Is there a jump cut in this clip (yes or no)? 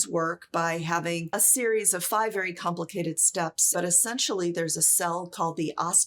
yes